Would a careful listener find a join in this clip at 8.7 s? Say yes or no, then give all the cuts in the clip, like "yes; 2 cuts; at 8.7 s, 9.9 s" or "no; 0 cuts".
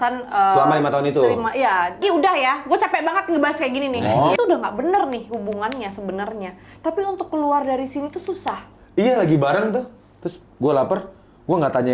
yes; 3 cuts; at 2.0 s, 4.4 s, 8.7 s